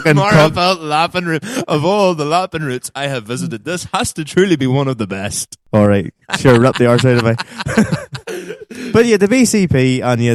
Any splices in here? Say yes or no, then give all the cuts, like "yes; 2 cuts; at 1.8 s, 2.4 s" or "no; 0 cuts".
no; 0 cuts